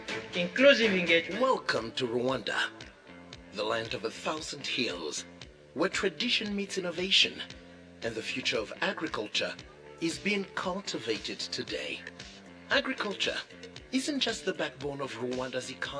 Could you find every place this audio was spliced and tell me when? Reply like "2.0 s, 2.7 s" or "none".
1.3 s